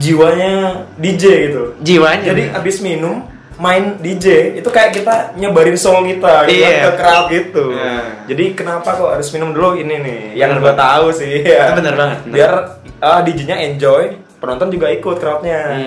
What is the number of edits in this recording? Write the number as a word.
zero